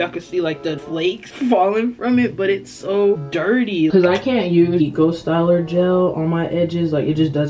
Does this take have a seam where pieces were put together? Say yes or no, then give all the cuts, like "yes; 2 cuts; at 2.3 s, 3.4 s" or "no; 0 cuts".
yes; 3 cuts; at 1.0 s, 3.9 s, 4.8 s